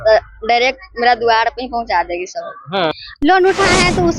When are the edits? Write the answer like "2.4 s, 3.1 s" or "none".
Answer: 2.9 s